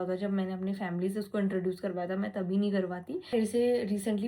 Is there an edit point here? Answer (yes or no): yes